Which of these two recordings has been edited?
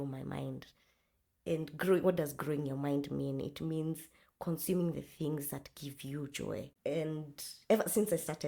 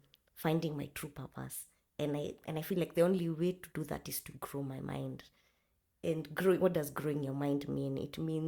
first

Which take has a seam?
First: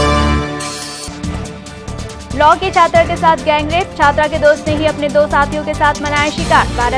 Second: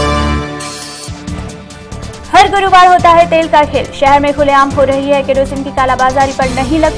first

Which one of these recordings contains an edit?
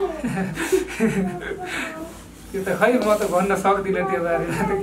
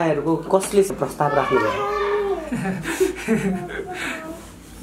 second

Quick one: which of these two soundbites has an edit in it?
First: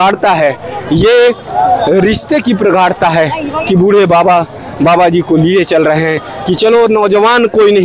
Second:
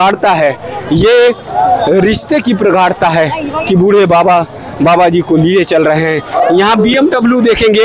second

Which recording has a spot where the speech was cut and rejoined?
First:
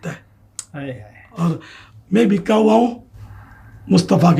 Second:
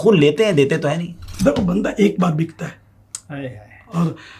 second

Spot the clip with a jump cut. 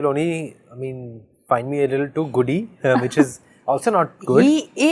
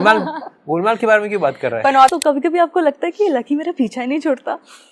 second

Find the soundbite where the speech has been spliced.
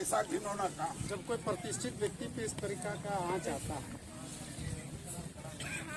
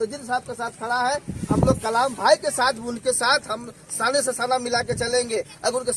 first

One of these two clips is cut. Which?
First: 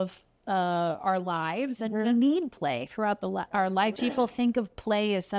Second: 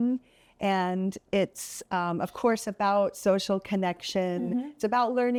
first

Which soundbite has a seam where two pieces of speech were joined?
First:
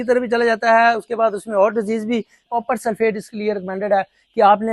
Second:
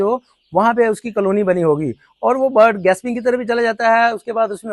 first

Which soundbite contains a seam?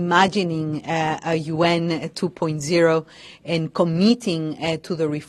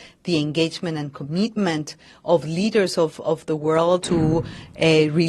second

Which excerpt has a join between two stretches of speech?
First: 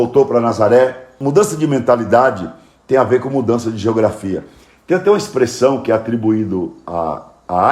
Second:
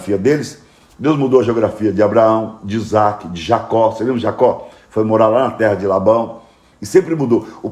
first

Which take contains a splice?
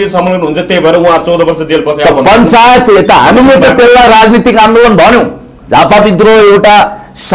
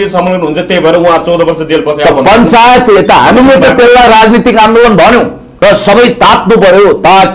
second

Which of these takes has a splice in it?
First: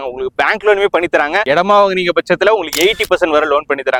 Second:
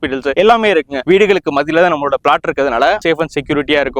second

